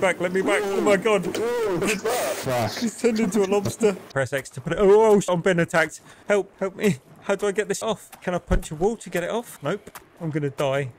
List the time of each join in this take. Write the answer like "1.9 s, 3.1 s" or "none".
1.8 s, 4.0 s, 5.3 s, 7.8 s, 10.0 s